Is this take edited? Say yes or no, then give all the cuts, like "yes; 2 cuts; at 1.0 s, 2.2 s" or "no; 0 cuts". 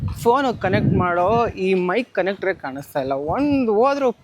no; 0 cuts